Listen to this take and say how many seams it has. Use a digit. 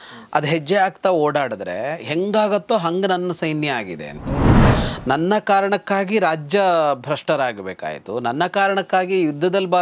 1